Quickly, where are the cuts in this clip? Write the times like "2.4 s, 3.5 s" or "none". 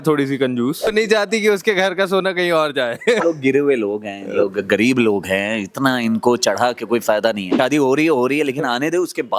0.9 s, 3.2 s, 7.5 s